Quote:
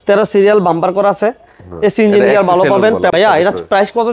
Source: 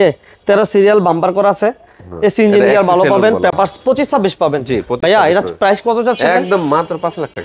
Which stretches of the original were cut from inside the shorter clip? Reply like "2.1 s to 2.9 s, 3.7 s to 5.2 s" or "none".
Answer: 3.5 s to 5.0 s